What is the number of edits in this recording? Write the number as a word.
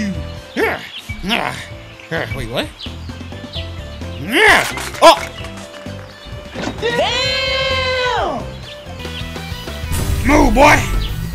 one